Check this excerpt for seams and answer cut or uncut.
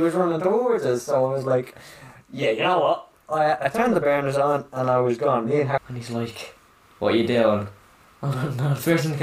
cut